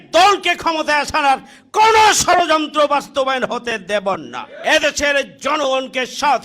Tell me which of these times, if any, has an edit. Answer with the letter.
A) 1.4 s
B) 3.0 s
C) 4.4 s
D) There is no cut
C